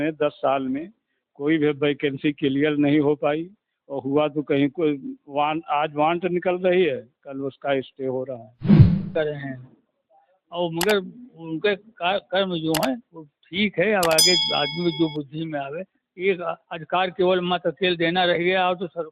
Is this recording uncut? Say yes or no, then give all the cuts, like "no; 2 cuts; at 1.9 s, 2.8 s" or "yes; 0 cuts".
no; 2 cuts; at 8.5 s, 9.1 s